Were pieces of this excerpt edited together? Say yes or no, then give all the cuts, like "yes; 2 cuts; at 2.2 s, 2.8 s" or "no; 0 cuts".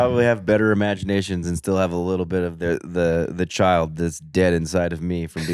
no; 0 cuts